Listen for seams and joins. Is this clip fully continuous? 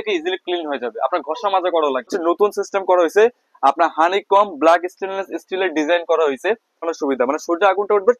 no; 2 cuts; at 2.1 s, 6.9 s

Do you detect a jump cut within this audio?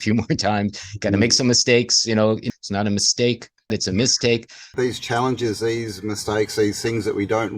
yes; 3 cuts; at 2.4 s, 3.7 s, 4.6 s

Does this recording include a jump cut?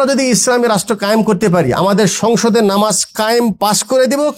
no; 0 cuts

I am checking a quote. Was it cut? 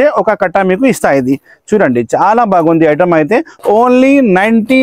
no; 0 cuts

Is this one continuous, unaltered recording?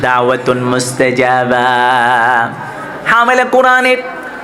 yes; 0 cuts

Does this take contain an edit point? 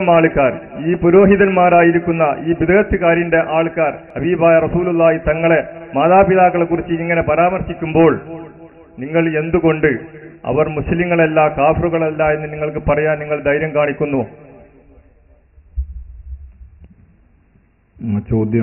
yes; 1 cut; at 4.1 s

